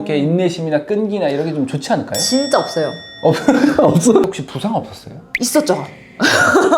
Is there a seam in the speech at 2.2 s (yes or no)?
no